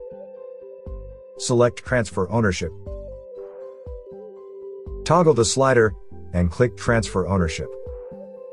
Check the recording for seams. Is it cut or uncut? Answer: cut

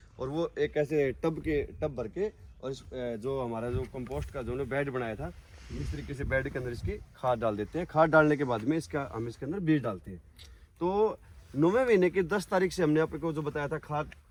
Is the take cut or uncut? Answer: uncut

